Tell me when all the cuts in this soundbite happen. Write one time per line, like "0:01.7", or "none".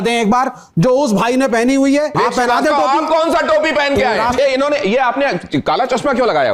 0:02.1
0:04.4